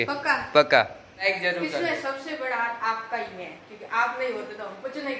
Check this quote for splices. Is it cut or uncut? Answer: cut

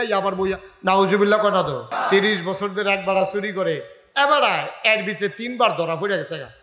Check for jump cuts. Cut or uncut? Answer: cut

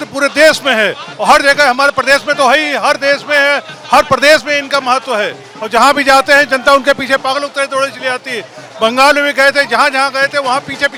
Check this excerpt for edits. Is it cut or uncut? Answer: uncut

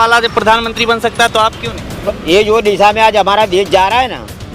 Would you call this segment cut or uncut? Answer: cut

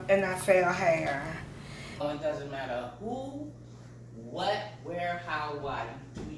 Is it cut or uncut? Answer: cut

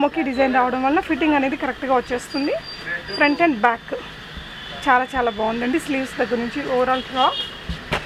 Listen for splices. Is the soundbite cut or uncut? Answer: uncut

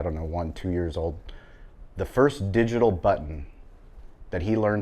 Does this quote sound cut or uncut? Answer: uncut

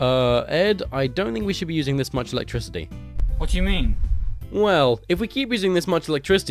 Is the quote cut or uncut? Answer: cut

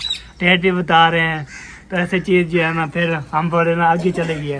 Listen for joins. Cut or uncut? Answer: uncut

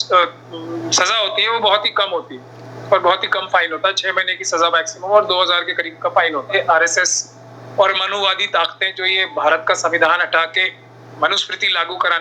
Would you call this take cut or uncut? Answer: cut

